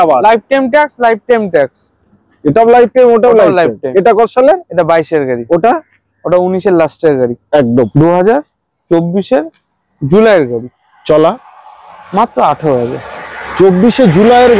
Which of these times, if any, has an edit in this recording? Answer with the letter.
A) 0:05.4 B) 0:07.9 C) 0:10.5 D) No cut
B